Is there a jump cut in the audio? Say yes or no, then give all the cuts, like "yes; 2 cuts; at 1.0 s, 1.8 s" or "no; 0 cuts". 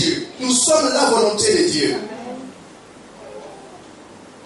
no; 0 cuts